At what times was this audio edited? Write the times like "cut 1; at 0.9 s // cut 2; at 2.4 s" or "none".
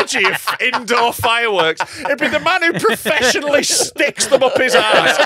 none

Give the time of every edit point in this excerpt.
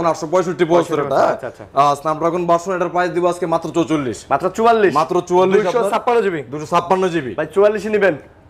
none

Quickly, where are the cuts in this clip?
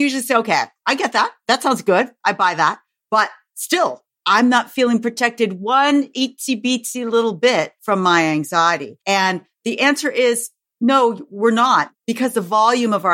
cut 1; at 7.8 s // cut 2; at 8.9 s // cut 3; at 12.0 s

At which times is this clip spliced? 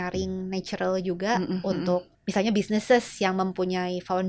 cut 1; at 2.2 s

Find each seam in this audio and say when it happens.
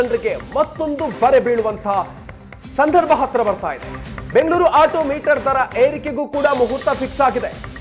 none

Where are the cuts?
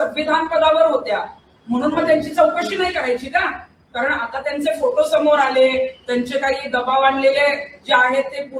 none

